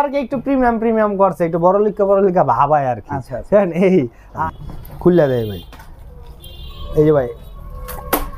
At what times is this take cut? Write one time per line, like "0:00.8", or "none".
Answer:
0:04.6